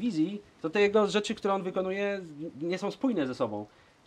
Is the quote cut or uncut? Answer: uncut